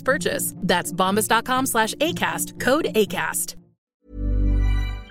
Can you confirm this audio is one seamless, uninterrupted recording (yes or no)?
no